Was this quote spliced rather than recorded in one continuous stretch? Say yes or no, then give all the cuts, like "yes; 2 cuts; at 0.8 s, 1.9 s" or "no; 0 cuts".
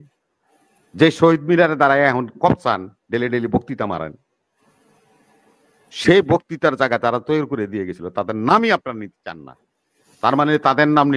no; 0 cuts